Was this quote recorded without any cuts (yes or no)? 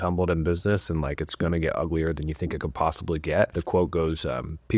no